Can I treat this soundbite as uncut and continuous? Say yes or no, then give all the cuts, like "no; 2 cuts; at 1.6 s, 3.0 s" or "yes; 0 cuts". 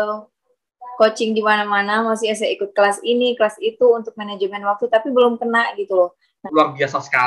no; 1 cut; at 6.3 s